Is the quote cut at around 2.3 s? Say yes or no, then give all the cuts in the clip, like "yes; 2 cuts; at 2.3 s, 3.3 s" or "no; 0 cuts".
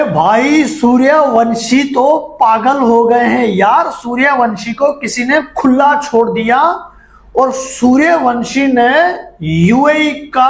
no; 0 cuts